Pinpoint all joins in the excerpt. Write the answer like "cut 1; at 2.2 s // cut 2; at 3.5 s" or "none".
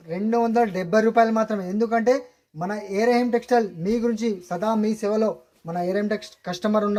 none